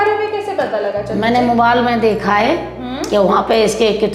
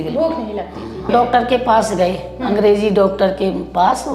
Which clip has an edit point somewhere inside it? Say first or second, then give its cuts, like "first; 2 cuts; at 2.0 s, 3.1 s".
second; 1 cut; at 1.1 s